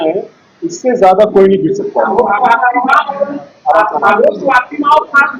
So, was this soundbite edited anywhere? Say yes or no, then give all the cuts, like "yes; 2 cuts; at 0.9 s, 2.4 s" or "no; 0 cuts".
no; 0 cuts